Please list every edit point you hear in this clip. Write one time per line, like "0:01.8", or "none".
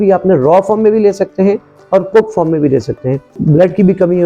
0:03.3